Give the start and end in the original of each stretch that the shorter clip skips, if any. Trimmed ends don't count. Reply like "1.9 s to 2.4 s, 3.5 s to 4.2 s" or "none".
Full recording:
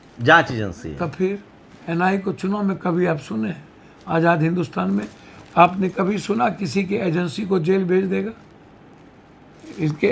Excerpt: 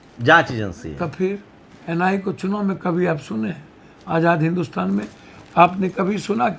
none